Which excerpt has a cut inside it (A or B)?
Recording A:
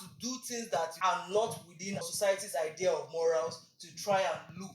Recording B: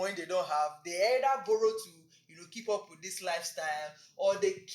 A